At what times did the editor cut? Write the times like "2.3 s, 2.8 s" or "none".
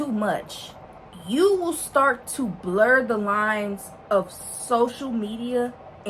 none